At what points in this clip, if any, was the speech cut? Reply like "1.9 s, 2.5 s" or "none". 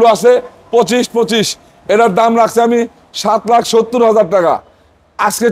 none